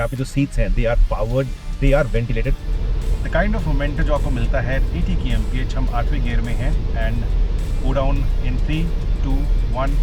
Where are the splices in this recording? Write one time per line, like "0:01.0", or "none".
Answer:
0:02.6